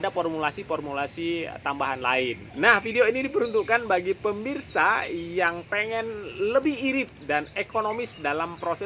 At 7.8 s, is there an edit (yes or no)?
no